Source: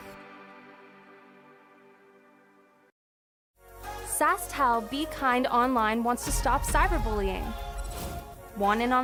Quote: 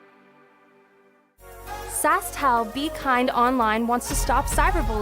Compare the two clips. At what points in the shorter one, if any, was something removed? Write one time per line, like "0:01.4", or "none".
0:01.3